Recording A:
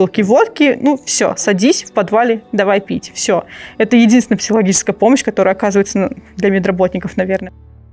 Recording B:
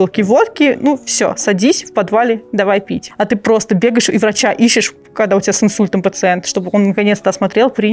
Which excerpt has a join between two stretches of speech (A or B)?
B